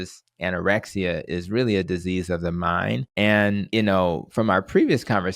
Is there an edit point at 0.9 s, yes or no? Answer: no